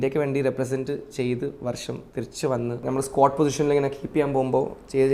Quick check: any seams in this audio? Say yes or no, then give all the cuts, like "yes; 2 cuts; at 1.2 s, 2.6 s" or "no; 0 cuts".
yes; 1 cut; at 2.8 s